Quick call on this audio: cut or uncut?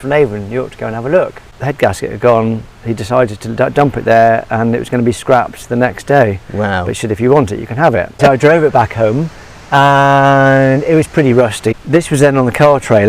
cut